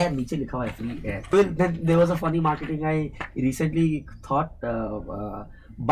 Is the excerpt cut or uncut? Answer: cut